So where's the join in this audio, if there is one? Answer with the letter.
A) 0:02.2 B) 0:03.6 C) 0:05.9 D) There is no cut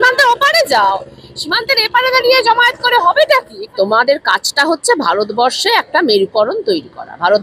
B